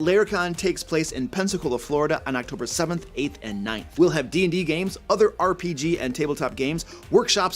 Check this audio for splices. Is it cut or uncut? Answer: cut